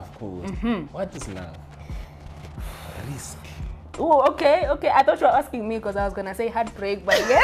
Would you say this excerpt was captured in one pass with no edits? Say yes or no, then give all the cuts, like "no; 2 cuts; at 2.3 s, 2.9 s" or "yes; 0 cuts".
yes; 0 cuts